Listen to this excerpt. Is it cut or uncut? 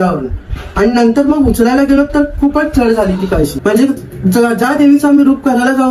cut